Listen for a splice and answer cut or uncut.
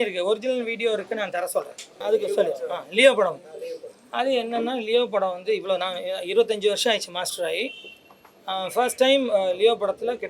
cut